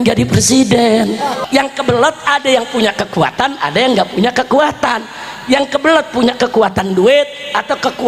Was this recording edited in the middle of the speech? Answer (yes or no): yes